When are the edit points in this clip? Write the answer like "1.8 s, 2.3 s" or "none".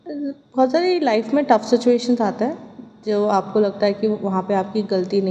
none